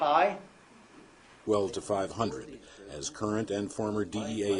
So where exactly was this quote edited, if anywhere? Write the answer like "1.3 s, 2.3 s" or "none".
none